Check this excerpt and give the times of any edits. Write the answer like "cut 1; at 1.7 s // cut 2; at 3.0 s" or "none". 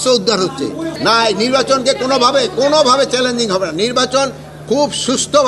cut 1; at 0.9 s

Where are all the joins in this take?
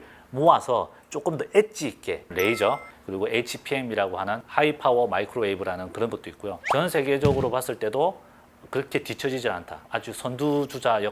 cut 1; at 2.3 s // cut 2; at 4.4 s // cut 3; at 6.5 s // cut 4; at 9.7 s

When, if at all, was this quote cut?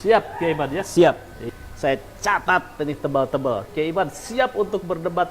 cut 1; at 1.4 s

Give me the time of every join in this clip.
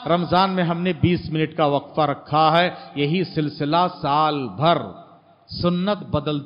none

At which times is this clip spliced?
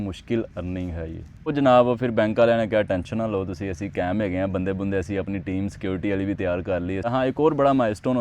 cut 1; at 1.5 s // cut 2; at 7.1 s

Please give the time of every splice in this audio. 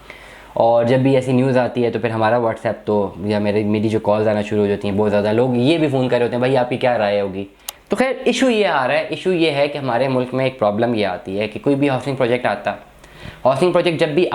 cut 1; at 7.7 s

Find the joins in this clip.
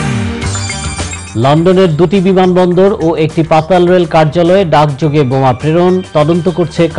cut 1; at 1.2 s

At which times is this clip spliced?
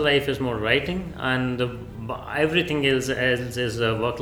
none

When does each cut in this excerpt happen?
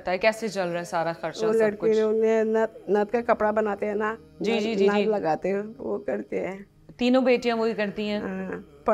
none

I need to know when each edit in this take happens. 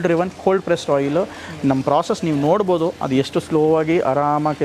none

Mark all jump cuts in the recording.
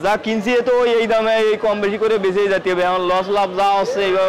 none

